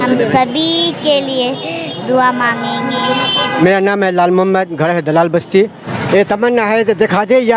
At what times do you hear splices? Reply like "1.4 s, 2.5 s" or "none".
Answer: 3.6 s, 5.8 s